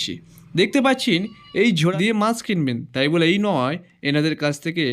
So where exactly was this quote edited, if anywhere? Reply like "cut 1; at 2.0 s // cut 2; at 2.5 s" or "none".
cut 1; at 1.9 s